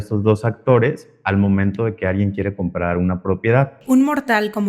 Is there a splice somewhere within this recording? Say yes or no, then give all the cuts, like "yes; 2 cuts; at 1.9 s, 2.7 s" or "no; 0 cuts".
yes; 1 cut; at 3.8 s